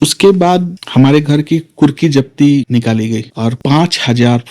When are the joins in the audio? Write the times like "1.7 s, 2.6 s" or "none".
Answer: 3.6 s